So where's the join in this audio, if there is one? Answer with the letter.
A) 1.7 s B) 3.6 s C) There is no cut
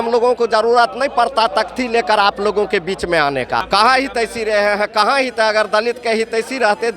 B